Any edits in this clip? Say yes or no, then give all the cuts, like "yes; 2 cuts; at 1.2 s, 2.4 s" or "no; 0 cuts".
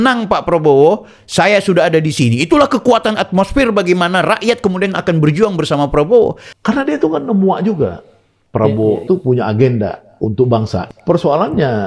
yes; 1 cut; at 6.5 s